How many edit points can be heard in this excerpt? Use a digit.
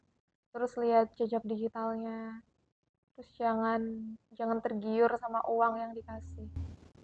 0